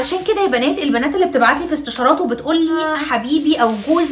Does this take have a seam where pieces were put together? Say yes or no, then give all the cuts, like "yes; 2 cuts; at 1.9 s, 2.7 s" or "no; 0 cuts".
yes; 1 cut; at 2.9 s